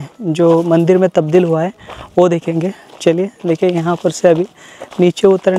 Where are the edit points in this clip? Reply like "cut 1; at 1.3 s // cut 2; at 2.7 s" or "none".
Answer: none